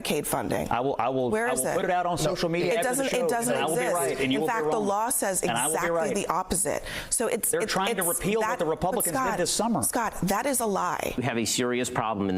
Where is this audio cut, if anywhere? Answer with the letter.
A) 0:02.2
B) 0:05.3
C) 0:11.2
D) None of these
C